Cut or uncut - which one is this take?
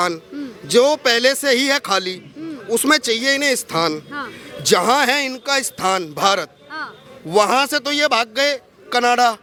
uncut